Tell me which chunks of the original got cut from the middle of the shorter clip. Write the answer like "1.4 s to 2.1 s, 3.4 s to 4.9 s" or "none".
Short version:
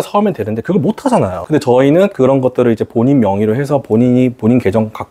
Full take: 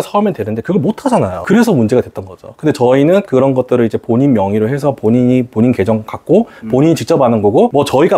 1.4 s to 2.5 s